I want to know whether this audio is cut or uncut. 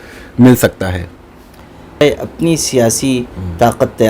cut